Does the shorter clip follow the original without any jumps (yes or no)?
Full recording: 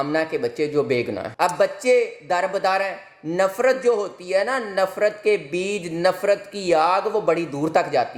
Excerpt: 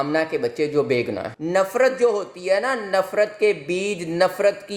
no